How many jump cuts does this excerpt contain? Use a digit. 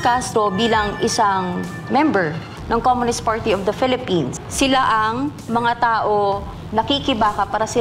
2